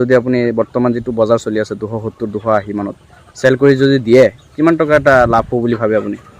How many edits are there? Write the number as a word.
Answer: zero